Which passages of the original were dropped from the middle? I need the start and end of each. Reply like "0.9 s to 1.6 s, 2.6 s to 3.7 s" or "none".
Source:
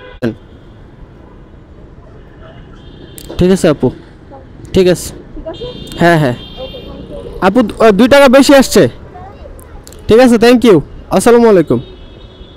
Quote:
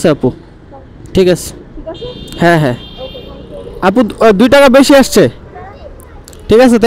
none